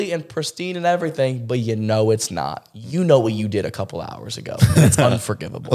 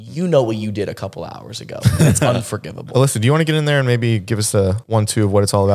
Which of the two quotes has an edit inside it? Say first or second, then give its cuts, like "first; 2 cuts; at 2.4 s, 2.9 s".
second; 1 cut; at 4.8 s